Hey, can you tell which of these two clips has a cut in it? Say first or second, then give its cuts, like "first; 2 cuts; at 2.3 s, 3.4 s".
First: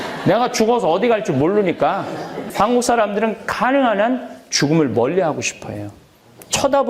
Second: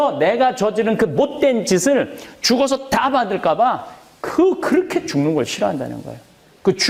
first; 1 cut; at 2.4 s